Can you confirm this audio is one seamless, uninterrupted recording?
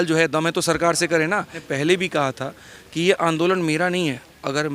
no; 1 cut; at 1.6 s

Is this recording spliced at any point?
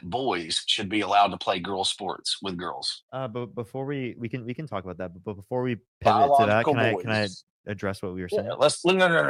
no; 0 cuts

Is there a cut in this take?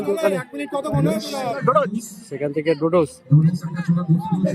yes; 1 cut; at 1.4 s

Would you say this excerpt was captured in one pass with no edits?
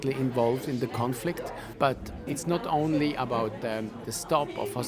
no; 1 cut; at 2.1 s

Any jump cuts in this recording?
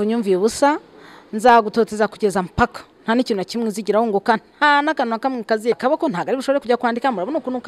yes; 1 cut; at 5.8 s

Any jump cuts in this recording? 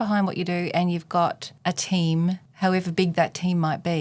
yes; 2 cuts; at 1.5 s, 2.5 s

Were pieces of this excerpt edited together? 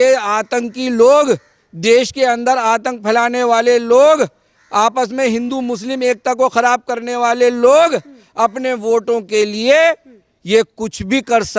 no; 0 cuts

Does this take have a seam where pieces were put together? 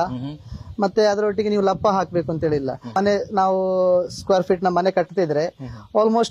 yes; 1 cut; at 2.9 s

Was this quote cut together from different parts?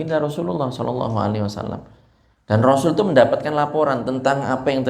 no; 0 cuts

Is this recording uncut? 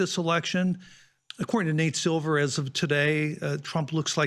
yes; 0 cuts

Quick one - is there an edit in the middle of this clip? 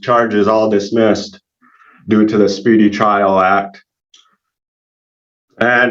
no; 0 cuts

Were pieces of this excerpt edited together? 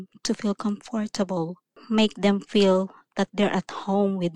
no; 0 cuts

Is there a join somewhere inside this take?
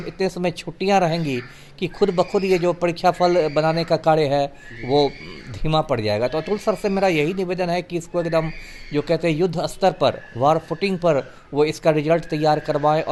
no; 0 cuts

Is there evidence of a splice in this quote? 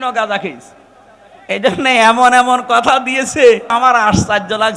yes; 1 cut; at 3.7 s

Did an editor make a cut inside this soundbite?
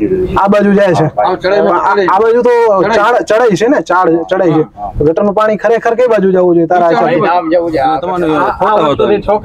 yes; 1 cut; at 8.1 s

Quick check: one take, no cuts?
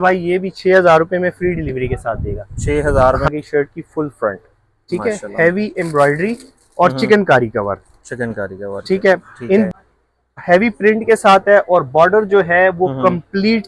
no; 2 cuts; at 3.3 s, 9.7 s

